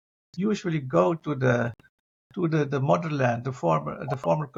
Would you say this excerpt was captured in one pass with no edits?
yes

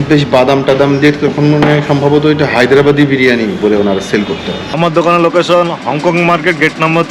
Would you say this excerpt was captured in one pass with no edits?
no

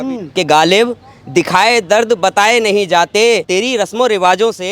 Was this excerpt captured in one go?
no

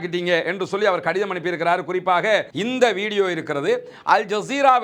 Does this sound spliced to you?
yes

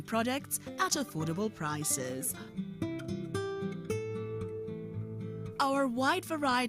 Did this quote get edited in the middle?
yes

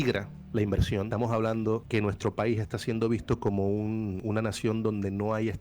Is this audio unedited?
no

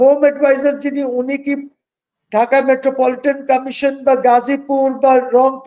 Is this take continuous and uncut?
yes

